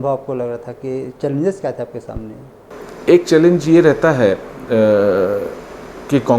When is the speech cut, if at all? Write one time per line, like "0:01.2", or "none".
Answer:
0:02.7